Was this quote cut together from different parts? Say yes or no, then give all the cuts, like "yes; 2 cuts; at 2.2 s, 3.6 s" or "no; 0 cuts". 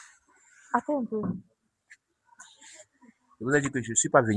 no; 0 cuts